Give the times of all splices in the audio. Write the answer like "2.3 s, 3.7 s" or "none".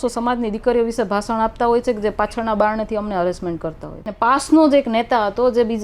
4.1 s